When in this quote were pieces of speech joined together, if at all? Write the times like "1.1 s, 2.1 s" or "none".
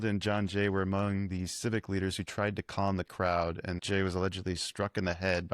3.8 s

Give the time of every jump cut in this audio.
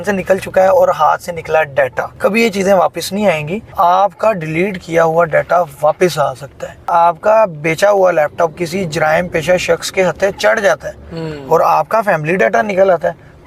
2.0 s, 3.7 s, 6.9 s

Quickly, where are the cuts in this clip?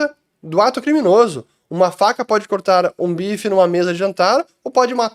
none

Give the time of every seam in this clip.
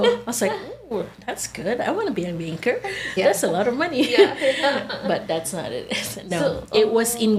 none

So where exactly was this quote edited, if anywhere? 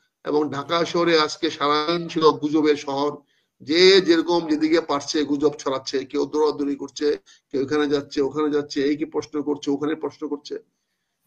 none

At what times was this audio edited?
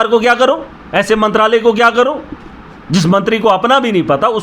none

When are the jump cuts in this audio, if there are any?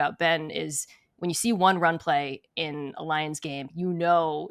none

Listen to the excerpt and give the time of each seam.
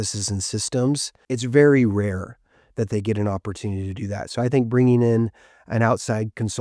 1.1 s

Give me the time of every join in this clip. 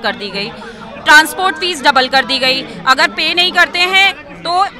none

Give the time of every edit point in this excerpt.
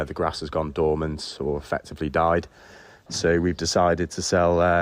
3.1 s

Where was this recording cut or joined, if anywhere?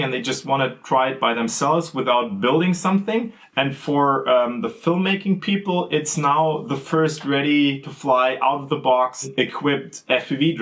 3.4 s, 9.2 s

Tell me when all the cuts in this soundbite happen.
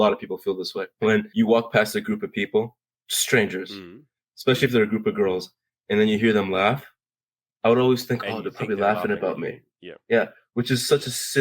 1.1 s

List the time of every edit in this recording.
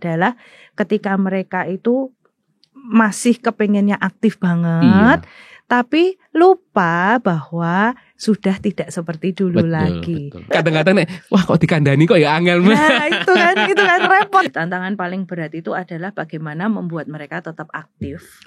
10.5 s, 14.5 s

